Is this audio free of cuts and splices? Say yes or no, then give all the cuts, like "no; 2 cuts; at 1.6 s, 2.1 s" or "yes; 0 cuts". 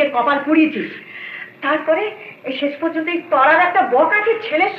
yes; 0 cuts